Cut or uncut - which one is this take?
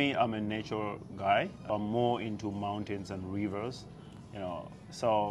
cut